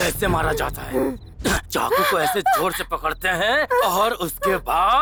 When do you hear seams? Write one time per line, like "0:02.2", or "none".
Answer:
none